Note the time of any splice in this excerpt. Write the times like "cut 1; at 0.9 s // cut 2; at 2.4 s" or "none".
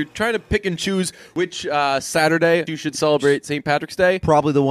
cut 1; at 1.3 s // cut 2; at 2.7 s